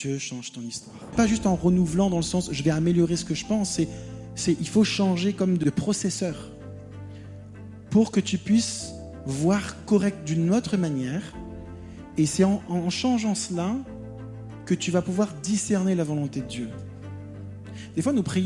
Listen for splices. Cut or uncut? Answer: cut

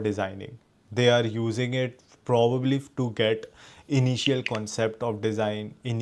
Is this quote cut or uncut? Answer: uncut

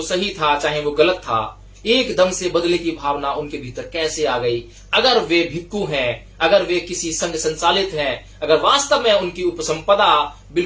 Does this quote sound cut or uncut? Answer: uncut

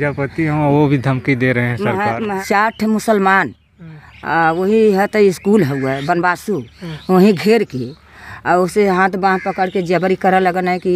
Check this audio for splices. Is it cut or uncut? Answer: cut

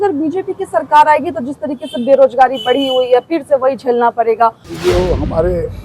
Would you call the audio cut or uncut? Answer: cut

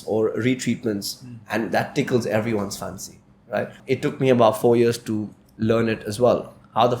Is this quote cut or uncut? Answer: cut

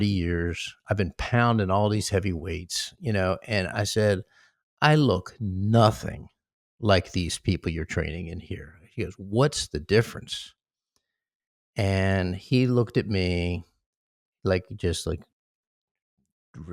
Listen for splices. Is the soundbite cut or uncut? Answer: uncut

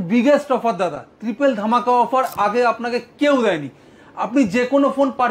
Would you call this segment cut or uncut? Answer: uncut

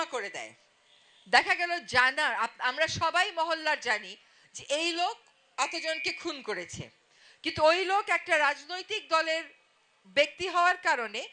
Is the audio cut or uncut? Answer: uncut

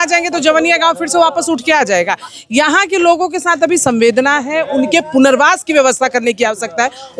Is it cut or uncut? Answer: uncut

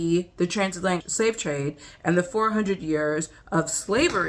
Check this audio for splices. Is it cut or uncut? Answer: cut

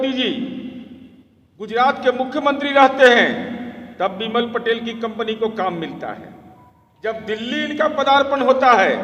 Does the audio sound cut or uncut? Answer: uncut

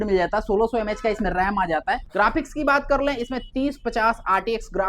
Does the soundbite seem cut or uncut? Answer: cut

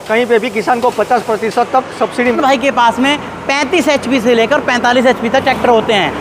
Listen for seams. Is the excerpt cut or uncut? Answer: cut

